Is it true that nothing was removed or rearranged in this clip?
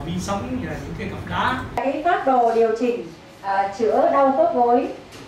no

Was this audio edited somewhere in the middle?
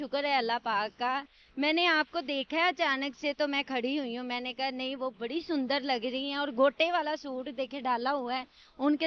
no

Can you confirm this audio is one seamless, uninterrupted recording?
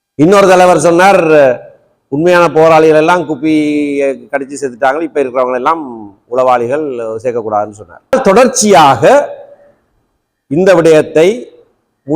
no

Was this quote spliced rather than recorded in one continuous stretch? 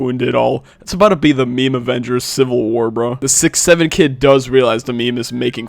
yes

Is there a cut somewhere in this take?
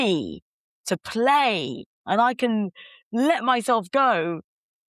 no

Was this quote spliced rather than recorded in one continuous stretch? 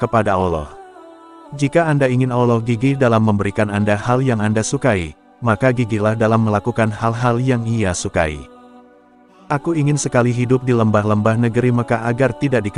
no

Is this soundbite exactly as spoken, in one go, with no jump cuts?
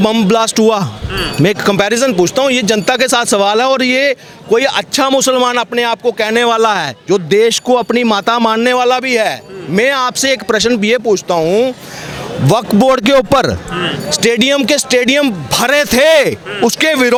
yes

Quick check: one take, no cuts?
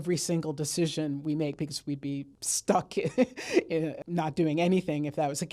no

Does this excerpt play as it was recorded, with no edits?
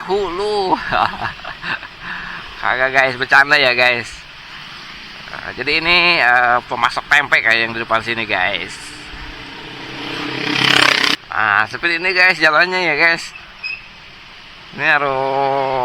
no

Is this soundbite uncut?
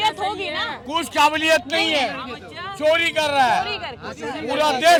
yes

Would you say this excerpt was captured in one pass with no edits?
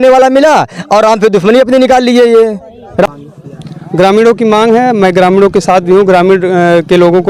no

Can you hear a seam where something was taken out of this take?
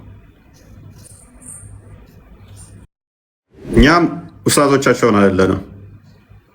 yes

